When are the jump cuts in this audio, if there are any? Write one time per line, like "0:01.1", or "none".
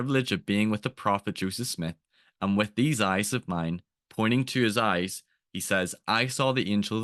none